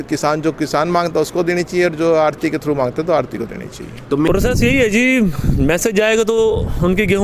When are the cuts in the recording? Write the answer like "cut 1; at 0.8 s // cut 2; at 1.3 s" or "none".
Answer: cut 1; at 4.3 s